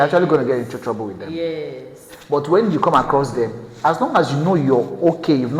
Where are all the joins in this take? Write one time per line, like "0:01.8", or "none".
none